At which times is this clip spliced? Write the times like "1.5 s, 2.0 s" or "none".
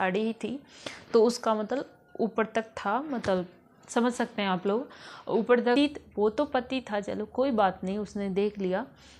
5.8 s